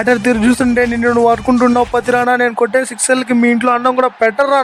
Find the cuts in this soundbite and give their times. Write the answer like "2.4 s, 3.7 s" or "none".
none